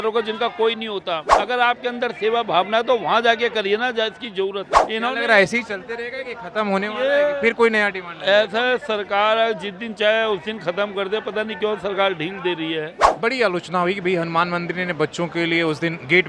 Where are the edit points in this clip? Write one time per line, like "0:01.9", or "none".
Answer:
0:01.3
0:04.6
0:13.0